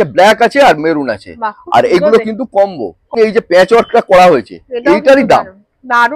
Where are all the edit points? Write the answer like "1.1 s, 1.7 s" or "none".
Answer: 3.1 s